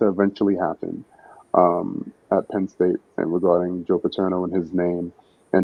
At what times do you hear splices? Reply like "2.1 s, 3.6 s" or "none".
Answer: none